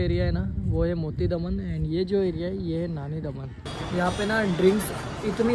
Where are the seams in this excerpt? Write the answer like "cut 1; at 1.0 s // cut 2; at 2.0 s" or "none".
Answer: cut 1; at 3.7 s

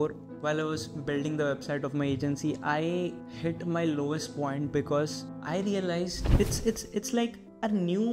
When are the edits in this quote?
cut 1; at 6.3 s

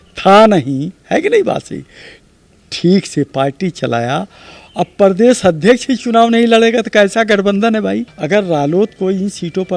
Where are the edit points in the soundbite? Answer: cut 1; at 8.1 s

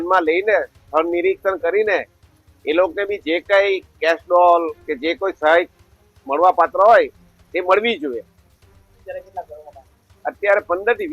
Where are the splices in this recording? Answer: none

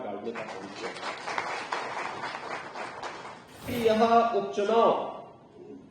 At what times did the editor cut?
cut 1; at 3.7 s

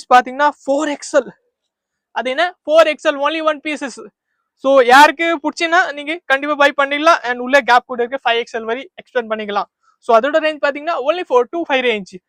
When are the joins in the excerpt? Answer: none

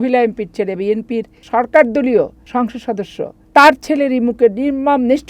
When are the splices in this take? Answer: cut 1; at 1.4 s // cut 2; at 2.8 s

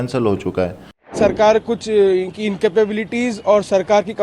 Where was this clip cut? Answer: cut 1; at 1.1 s

